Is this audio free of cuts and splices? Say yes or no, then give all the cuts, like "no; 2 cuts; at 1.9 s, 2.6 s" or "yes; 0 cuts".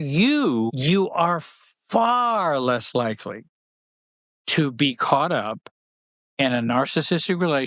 yes; 0 cuts